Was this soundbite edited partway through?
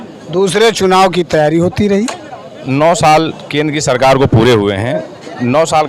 yes; 1 cut; at 2.6 s

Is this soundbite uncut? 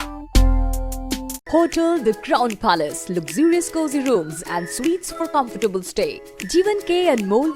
no; 1 cut; at 1.4 s

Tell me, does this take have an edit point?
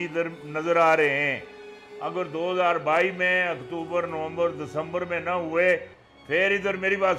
no; 0 cuts

